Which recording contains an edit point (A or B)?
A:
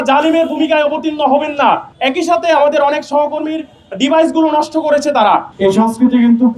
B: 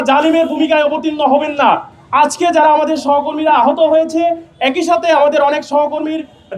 A